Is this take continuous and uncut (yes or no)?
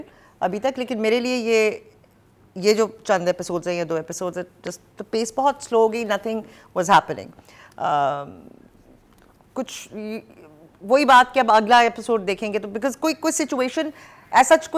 yes